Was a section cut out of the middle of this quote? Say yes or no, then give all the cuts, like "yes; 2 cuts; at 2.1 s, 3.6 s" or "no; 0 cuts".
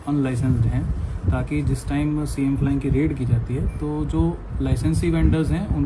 no; 0 cuts